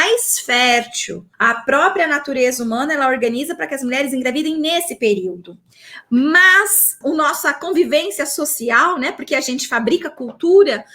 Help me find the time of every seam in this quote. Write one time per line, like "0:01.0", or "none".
0:01.2
0:07.0